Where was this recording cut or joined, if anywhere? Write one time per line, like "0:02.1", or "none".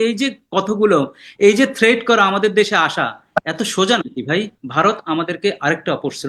0:04.6